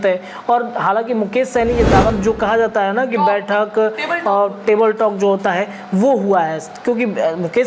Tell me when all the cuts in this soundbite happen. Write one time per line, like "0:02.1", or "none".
0:02.1